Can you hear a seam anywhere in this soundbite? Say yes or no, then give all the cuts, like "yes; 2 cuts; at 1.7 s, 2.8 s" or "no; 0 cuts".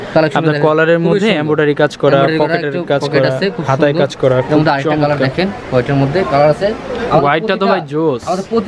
no; 0 cuts